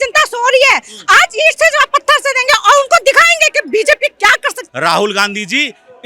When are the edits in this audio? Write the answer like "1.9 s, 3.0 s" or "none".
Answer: 4.6 s